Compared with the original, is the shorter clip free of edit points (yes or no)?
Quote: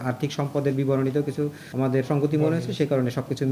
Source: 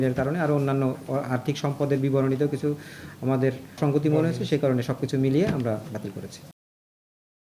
no